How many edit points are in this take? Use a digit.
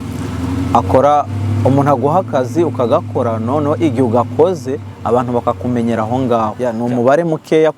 1